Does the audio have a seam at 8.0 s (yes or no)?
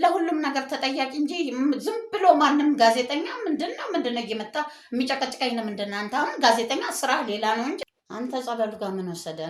yes